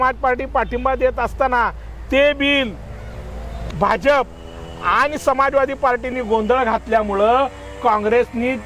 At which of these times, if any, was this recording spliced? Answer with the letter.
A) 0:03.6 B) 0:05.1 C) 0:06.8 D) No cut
A